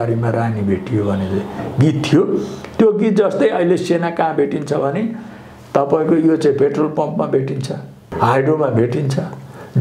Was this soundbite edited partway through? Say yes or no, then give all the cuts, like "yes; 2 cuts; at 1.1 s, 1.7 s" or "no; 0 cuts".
yes; 1 cut; at 8.1 s